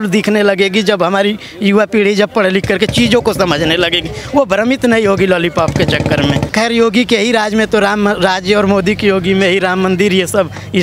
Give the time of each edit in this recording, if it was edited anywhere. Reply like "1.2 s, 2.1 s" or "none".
6.5 s